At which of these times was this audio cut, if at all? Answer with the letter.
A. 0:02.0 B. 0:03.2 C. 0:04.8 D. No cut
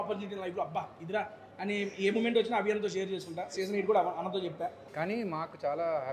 C